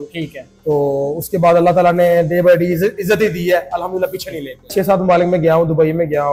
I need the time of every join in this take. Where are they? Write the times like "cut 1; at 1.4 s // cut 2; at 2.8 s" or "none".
cut 1; at 4.7 s